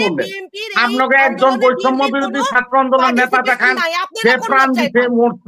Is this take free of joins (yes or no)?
yes